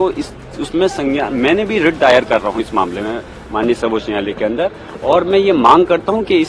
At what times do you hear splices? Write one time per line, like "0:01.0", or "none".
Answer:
none